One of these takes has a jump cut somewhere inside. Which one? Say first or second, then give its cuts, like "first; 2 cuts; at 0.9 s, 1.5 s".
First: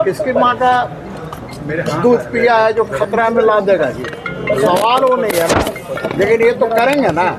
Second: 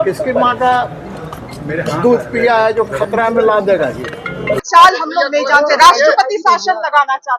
second; 1 cut; at 4.6 s